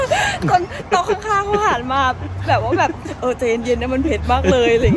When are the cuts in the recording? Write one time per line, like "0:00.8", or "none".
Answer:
none